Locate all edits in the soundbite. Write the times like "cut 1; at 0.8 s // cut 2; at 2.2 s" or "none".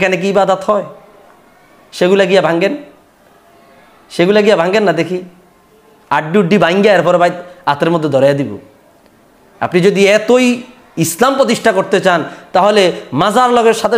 none